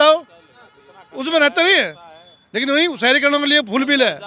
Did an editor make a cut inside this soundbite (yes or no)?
no